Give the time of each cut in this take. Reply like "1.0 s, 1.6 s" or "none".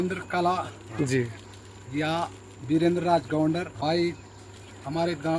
3.7 s